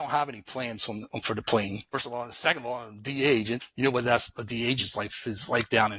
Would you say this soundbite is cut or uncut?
cut